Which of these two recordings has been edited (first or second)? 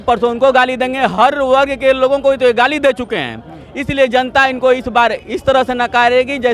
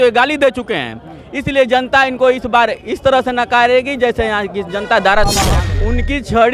second